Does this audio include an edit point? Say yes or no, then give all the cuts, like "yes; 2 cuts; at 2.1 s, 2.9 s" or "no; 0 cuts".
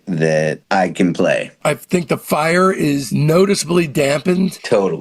yes; 2 cuts; at 1.5 s, 3.1 s